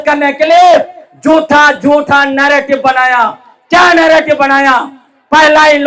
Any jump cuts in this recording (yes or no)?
no